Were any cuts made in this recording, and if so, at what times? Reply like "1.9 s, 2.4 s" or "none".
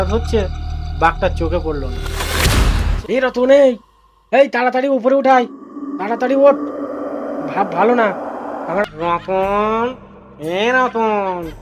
2.9 s, 8.8 s